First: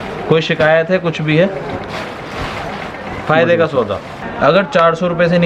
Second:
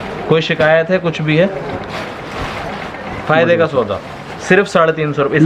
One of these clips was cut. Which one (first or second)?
first